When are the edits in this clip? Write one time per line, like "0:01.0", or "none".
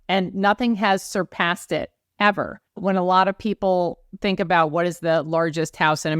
0:02.0
0:02.6